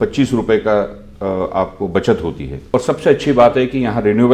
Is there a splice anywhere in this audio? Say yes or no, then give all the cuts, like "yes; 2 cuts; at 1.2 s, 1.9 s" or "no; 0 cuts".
yes; 1 cut; at 2.6 s